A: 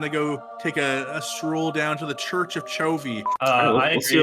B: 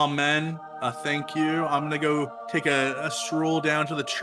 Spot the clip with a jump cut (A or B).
A